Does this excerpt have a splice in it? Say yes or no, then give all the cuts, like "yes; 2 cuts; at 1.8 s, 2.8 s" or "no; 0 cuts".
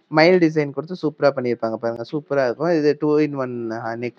no; 0 cuts